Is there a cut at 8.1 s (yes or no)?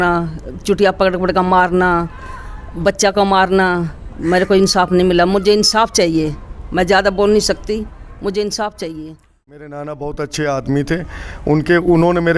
no